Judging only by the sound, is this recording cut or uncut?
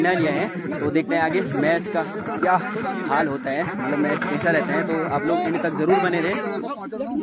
uncut